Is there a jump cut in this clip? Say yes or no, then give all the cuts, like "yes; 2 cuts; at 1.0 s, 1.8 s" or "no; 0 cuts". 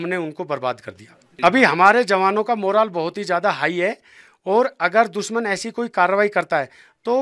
no; 0 cuts